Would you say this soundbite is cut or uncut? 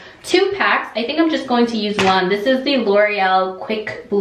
uncut